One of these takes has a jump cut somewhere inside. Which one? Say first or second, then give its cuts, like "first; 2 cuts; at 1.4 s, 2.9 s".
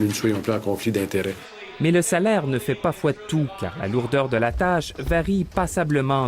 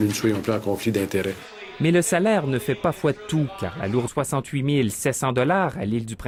first; 1 cut; at 4.1 s